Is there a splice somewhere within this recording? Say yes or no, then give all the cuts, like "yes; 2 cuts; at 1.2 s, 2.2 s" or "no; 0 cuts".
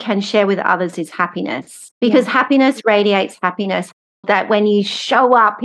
yes; 2 cuts; at 1.8 s, 4.1 s